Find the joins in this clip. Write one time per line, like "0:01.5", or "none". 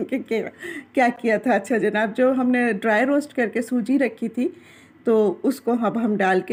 none

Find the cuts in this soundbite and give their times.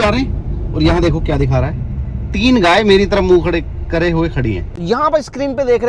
0:04.7

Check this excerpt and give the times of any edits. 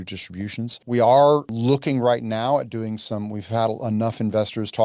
0:00.8
0:01.5

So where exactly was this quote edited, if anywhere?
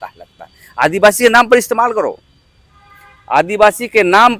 none

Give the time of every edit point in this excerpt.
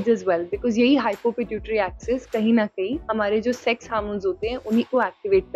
0:03.0

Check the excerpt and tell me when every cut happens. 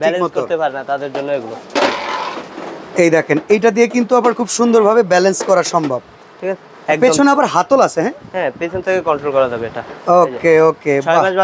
none

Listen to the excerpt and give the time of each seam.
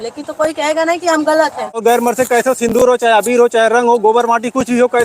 0:01.8

